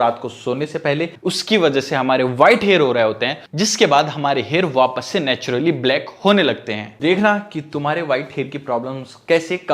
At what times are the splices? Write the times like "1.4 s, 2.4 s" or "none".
1.1 s, 3.3 s, 6.9 s